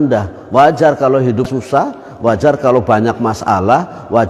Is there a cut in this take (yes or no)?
yes